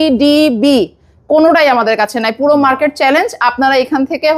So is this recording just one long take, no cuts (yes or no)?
yes